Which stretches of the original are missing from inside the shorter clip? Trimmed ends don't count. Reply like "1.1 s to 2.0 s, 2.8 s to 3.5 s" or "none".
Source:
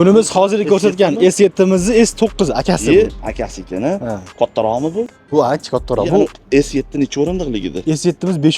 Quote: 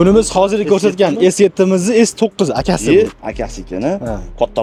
none